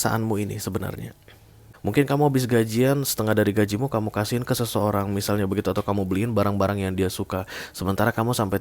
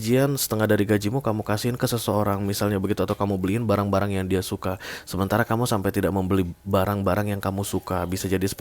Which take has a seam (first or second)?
first